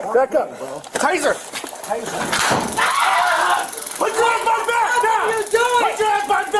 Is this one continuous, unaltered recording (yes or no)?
yes